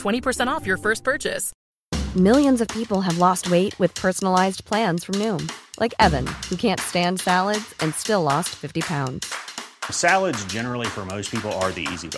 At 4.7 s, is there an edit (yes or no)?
no